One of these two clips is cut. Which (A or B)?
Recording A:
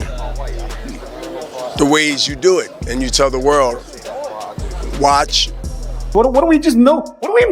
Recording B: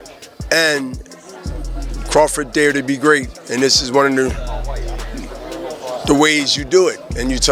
A